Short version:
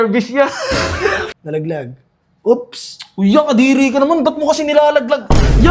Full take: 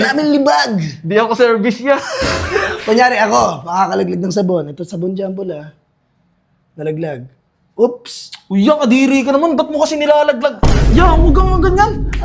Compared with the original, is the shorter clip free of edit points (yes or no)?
no